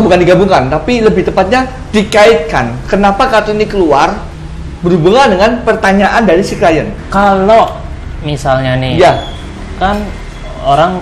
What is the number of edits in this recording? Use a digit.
1